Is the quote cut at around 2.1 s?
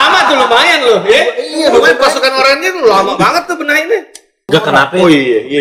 no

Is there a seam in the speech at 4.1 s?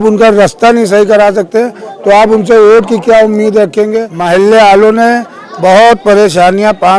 yes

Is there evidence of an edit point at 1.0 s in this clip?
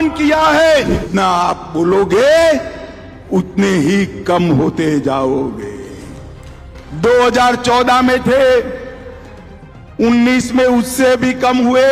yes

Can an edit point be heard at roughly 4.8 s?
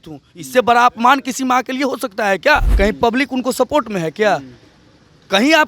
no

